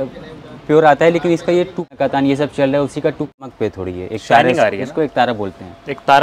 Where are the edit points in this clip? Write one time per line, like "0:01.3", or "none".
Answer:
0:01.9
0:03.3